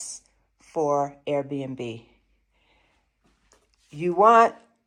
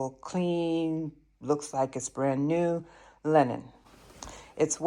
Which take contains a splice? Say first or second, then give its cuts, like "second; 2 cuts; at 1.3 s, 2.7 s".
second; 1 cut; at 3.8 s